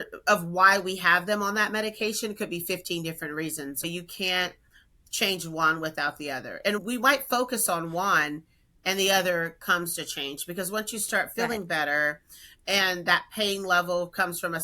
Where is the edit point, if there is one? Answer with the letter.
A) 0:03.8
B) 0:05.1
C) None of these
A